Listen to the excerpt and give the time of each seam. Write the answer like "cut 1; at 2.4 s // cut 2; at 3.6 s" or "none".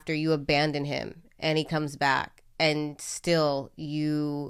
none